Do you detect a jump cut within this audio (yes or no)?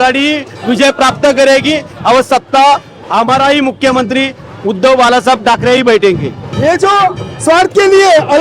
yes